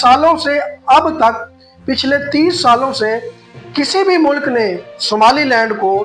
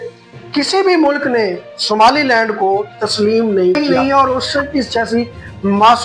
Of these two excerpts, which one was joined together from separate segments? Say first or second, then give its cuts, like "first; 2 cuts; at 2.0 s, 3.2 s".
second; 1 cut; at 3.8 s